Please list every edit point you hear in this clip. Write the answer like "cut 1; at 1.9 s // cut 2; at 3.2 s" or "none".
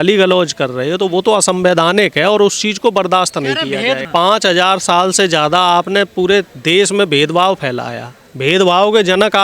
cut 1; at 4.0 s